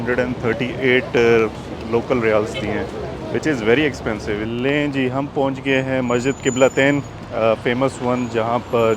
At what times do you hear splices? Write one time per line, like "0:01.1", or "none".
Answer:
0:04.5